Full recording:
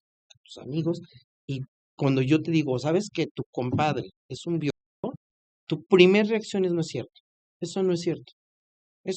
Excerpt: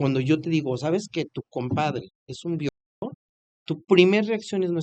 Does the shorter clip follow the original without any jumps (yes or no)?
yes